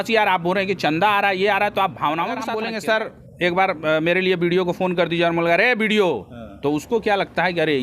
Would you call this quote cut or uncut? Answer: cut